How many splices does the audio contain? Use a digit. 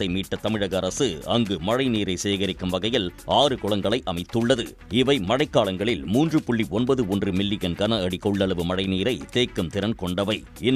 0